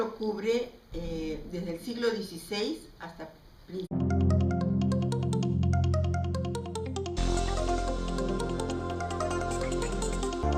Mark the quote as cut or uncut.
uncut